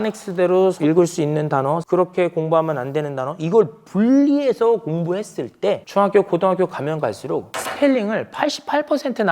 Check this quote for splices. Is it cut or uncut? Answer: cut